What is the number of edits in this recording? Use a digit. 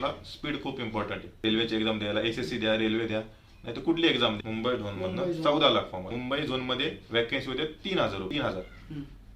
4